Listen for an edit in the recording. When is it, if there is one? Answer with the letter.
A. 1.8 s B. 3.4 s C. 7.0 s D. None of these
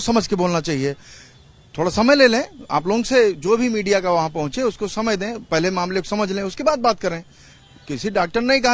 D